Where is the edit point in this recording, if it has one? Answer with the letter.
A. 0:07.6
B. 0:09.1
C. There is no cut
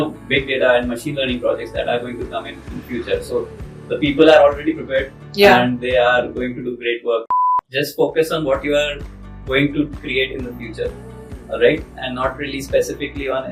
A